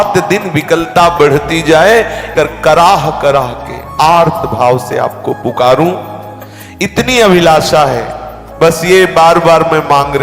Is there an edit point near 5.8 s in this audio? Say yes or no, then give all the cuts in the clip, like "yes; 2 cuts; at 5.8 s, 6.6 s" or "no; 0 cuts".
no; 1 cut; at 2.2 s